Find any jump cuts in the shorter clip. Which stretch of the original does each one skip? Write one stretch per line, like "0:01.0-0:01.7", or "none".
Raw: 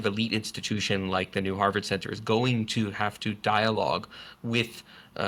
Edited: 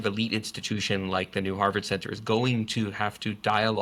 none